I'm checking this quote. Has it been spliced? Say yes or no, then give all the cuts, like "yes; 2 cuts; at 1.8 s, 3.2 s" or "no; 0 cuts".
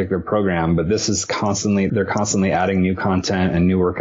yes; 1 cut; at 1.9 s